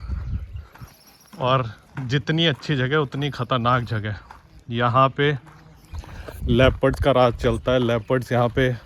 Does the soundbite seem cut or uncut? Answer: uncut